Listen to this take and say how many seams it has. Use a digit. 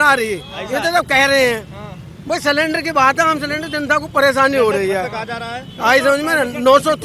0